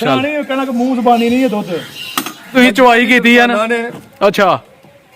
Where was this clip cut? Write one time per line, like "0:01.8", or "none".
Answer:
0:02.5